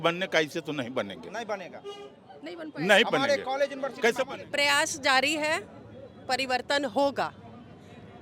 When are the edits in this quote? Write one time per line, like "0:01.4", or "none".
0:04.3